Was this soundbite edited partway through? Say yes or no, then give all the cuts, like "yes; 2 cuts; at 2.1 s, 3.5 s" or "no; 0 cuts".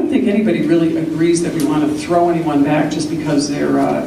no; 0 cuts